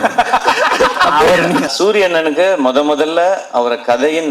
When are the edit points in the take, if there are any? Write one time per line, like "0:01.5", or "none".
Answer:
0:01.7